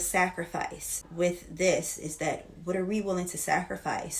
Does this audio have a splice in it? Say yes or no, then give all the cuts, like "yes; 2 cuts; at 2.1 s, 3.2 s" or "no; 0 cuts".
yes; 1 cut; at 1.0 s